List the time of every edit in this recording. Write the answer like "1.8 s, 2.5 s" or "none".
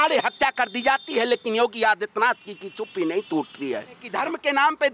4.1 s